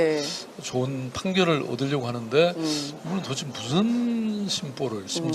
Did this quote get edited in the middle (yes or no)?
yes